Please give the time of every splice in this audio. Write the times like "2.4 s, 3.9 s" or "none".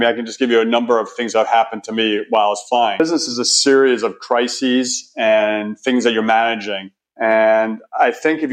3.0 s